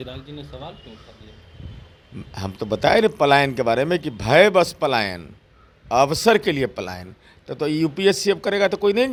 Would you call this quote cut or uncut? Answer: uncut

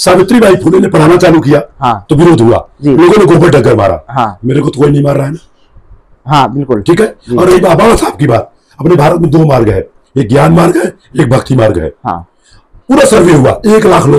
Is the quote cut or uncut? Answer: uncut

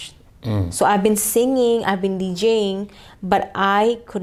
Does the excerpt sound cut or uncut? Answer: uncut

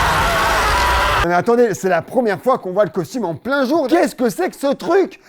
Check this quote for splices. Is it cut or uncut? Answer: cut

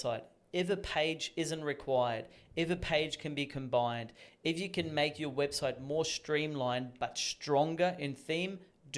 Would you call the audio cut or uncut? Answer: uncut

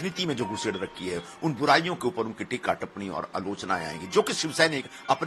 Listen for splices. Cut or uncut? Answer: uncut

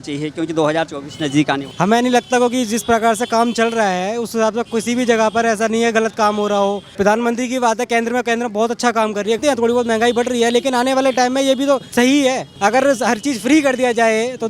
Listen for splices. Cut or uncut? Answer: cut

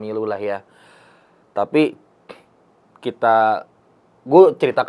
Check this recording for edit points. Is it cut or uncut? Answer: uncut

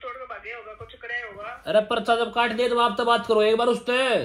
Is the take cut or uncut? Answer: uncut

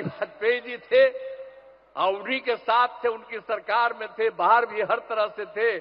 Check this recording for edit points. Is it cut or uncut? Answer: uncut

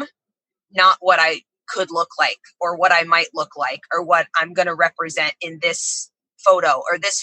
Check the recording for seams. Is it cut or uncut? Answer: uncut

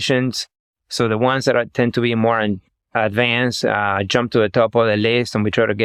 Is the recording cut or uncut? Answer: uncut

